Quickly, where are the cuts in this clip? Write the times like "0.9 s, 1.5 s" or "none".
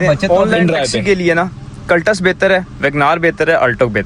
1.0 s